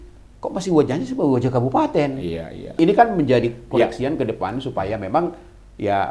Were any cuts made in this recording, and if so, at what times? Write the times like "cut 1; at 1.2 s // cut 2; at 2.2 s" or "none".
cut 1; at 2.8 s